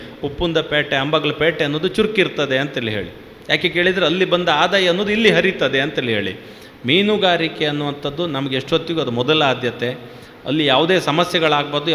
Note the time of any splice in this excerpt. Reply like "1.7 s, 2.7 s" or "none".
none